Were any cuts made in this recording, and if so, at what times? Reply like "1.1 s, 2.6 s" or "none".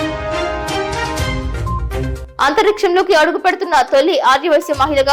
2.2 s